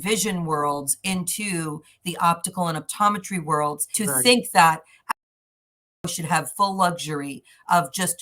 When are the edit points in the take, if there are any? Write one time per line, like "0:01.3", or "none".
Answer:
0:03.8